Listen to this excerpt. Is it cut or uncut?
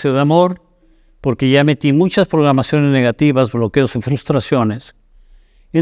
uncut